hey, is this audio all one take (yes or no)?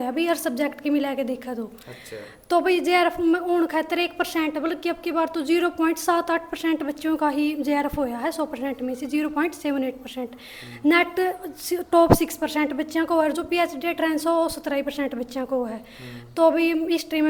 yes